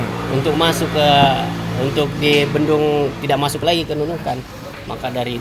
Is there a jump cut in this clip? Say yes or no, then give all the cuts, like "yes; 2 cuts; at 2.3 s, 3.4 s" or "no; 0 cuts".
no; 0 cuts